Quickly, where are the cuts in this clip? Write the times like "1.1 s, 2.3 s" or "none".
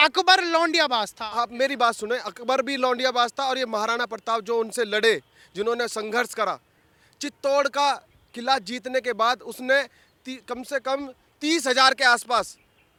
none